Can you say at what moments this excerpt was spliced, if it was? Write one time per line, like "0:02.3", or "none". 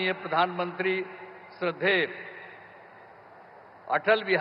none